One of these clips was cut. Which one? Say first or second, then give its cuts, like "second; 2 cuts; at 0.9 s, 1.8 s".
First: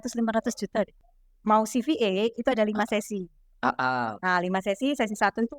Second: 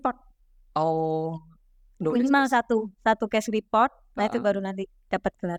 first; 1 cut; at 1.0 s